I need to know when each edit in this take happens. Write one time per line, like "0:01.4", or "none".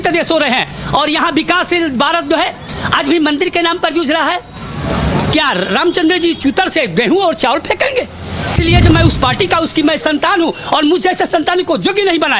0:08.5